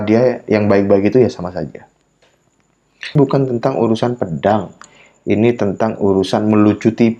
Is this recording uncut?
no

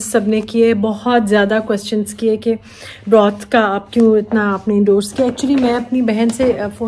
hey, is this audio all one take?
yes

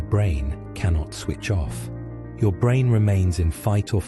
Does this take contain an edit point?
yes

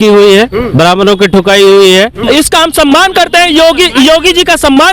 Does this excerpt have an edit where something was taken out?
yes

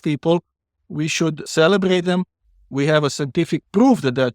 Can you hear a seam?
yes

